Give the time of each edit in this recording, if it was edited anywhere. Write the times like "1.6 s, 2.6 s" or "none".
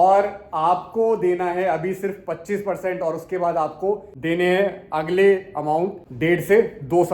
6.0 s